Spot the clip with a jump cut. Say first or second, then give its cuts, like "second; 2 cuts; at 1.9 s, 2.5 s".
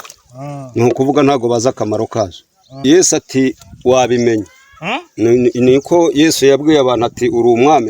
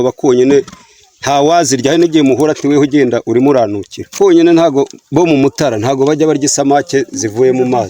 first; 1 cut; at 2.8 s